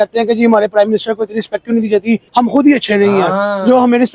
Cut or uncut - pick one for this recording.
cut